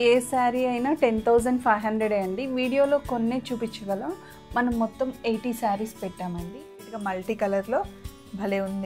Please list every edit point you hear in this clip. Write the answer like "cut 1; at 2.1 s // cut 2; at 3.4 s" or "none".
cut 1; at 6.9 s